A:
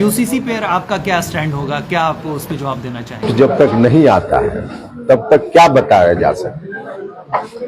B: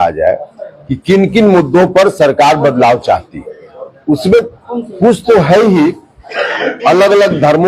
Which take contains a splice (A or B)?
A